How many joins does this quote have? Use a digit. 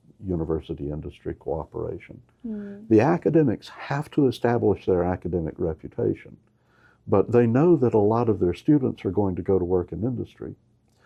0